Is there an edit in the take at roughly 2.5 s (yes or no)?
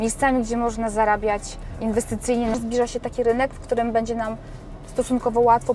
yes